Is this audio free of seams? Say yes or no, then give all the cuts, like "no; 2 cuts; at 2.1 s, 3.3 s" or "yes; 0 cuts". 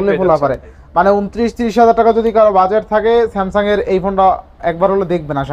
yes; 0 cuts